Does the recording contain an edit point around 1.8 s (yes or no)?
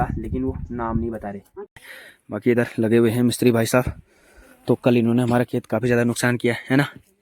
yes